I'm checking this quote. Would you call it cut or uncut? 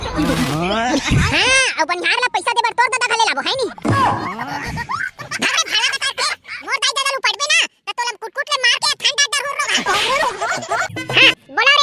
cut